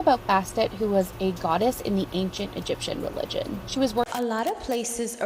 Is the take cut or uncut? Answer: cut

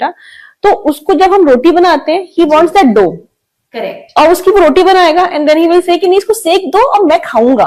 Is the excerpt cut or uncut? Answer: uncut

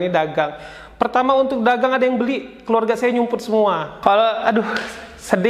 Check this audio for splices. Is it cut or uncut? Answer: cut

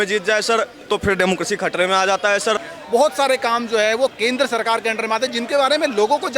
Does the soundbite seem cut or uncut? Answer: cut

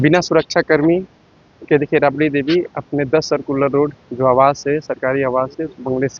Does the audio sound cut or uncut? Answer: uncut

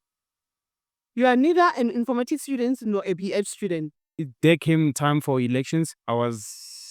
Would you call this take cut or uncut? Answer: cut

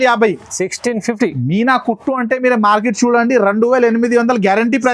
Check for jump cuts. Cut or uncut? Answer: uncut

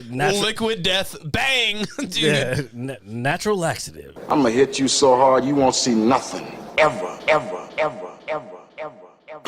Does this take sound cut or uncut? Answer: cut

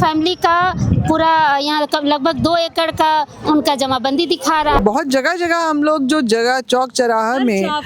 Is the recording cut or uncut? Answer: cut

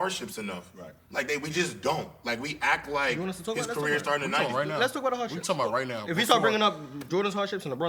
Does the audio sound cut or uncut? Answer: uncut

